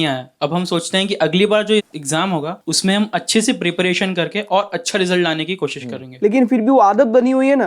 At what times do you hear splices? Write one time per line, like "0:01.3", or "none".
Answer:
0:02.6
0:06.1